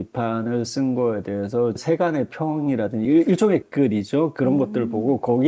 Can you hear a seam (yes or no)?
yes